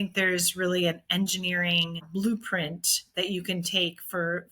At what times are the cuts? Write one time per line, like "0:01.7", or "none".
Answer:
0:02.1